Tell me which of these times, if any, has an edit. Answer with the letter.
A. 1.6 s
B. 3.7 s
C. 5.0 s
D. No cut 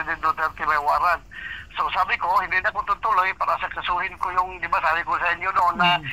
D